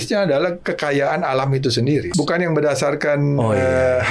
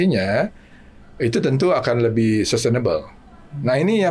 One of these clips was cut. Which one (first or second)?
first